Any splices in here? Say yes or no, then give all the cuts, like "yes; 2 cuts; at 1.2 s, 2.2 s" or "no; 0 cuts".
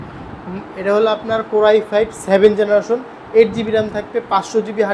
no; 0 cuts